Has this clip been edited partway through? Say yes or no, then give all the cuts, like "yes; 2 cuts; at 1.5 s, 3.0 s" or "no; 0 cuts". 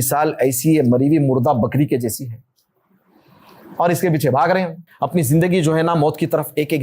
yes; 1 cut; at 4.8 s